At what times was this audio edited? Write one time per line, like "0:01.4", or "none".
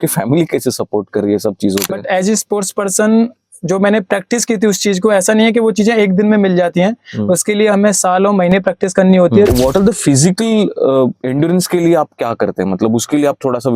0:01.8
0:09.5